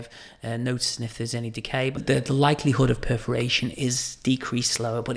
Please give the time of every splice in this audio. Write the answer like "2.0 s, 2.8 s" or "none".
2.0 s